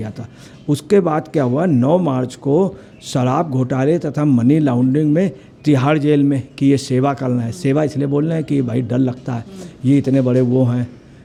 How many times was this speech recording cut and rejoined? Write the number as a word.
zero